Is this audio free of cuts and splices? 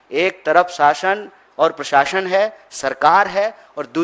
yes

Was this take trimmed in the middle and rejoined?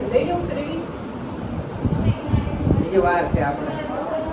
no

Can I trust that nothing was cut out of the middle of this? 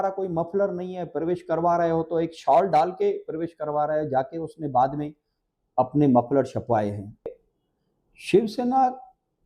no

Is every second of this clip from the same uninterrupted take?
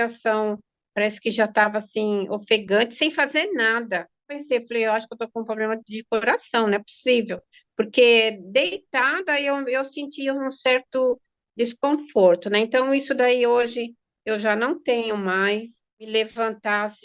no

